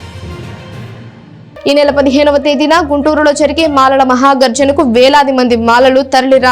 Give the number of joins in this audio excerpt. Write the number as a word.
one